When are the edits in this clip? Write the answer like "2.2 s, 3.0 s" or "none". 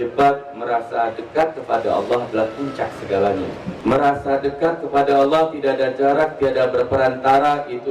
3.7 s